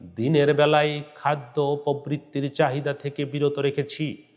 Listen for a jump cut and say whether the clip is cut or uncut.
uncut